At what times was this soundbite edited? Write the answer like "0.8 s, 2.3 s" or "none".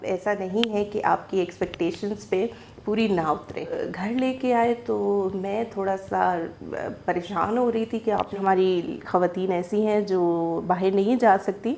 3.9 s, 8.3 s

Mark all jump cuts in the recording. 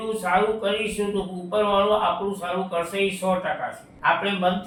none

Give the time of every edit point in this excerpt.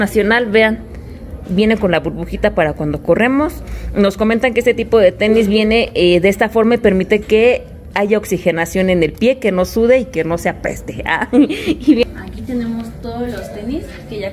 12.0 s

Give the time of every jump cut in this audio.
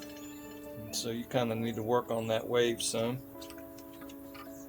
3.2 s

